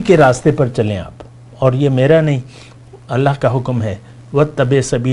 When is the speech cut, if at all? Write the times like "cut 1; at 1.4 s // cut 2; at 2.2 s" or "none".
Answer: none